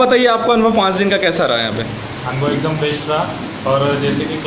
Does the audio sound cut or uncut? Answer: uncut